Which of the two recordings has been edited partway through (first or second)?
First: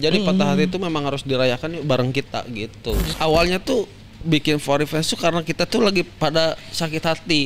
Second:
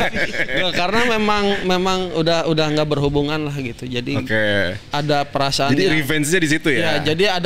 first